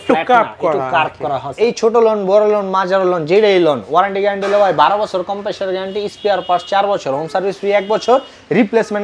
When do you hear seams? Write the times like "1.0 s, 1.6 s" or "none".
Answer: 1.5 s